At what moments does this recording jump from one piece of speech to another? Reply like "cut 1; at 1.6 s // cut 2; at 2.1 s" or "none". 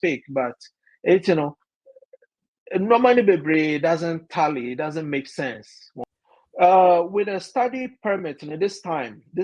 cut 1; at 6.2 s